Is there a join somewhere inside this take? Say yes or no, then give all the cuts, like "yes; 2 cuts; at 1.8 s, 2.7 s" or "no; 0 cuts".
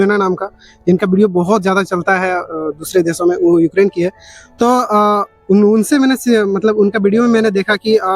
no; 0 cuts